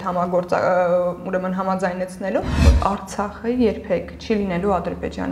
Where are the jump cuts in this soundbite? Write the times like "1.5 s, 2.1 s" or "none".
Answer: 2.6 s